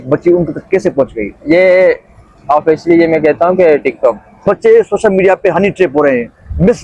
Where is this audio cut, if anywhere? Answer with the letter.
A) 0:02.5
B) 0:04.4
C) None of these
B